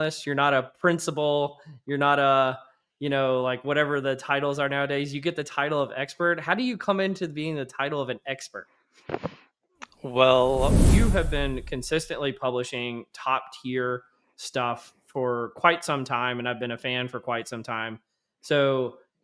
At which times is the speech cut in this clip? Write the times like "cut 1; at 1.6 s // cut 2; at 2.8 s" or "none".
cut 1; at 10.9 s